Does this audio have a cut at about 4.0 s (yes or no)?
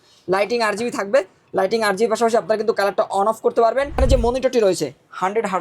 yes